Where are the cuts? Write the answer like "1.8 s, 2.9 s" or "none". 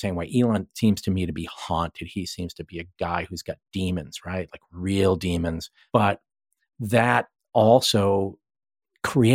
5.7 s